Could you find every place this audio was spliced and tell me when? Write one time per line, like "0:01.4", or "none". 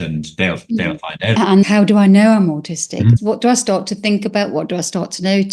0:01.5
0:03.2